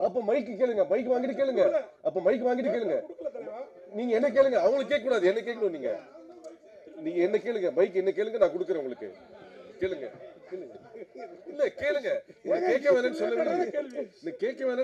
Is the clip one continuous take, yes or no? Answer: yes